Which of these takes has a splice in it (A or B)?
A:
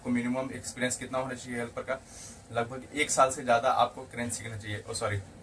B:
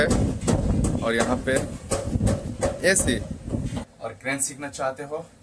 B